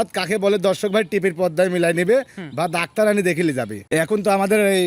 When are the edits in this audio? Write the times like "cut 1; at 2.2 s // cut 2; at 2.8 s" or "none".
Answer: cut 1; at 3.8 s